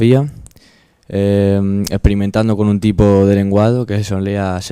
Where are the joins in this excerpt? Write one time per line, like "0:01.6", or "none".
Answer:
0:02.9